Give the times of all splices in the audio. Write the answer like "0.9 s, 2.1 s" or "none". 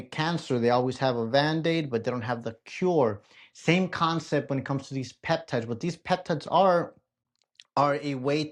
none